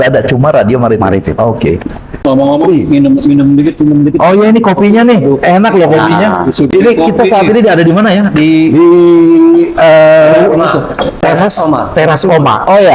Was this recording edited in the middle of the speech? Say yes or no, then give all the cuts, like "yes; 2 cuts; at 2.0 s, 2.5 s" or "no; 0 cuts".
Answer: yes; 1 cut; at 2.2 s